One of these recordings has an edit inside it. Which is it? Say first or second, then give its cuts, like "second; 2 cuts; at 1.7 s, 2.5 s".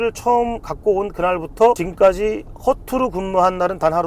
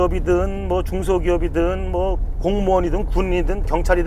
first; 1 cut; at 1.9 s